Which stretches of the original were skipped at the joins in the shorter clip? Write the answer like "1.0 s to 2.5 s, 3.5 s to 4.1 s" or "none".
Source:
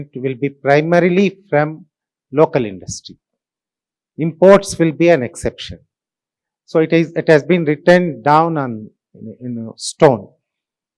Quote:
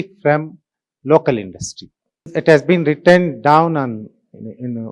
3.6 s to 7.1 s